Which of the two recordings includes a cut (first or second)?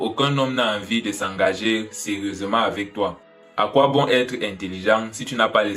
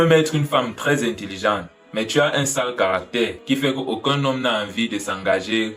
first